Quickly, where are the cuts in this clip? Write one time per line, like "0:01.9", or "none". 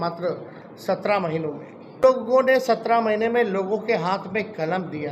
0:02.0